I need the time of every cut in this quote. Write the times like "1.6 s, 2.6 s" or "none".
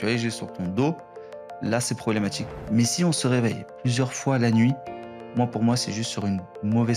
2.5 s